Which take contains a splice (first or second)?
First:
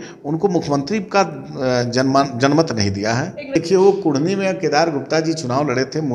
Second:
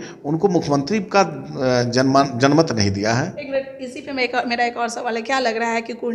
first